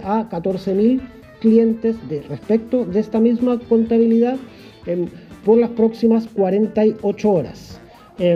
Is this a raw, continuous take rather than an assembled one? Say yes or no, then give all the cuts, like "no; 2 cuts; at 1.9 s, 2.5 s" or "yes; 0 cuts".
yes; 0 cuts